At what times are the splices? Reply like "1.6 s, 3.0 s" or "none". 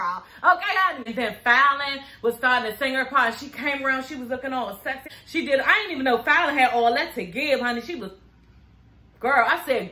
1.0 s, 5.1 s